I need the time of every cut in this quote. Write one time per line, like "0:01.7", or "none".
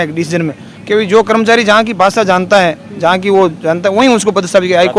none